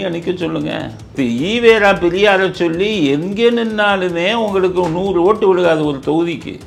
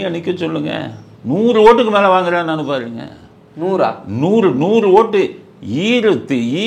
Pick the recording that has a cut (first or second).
first